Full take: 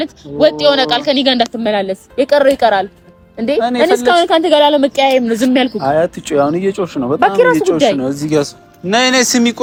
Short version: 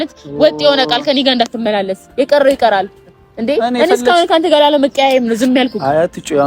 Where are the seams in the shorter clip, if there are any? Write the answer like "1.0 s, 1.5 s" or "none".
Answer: none